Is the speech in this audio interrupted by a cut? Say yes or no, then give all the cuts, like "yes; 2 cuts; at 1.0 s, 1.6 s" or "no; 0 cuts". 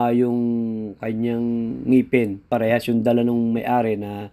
yes; 1 cut; at 2.5 s